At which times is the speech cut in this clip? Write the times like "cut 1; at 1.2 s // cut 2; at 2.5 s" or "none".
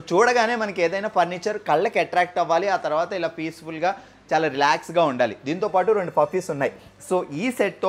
none